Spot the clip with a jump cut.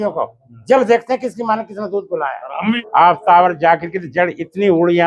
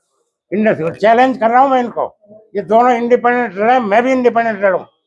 first; 1 cut; at 2.8 s

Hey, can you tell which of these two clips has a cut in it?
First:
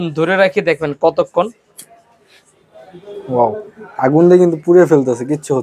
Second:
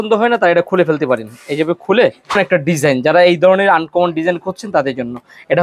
second; 1 cut; at 2.4 s

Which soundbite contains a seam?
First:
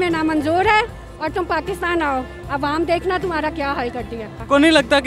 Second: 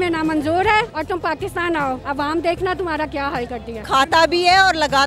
second; 3 cuts; at 0.9 s, 2.0 s, 3.7 s

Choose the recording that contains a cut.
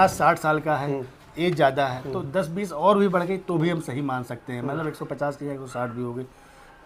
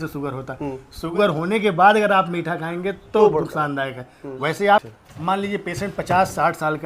second; 2 cuts; at 1.0 s, 4.9 s

